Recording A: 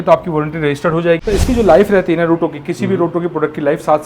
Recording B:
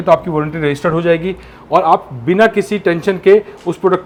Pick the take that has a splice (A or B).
A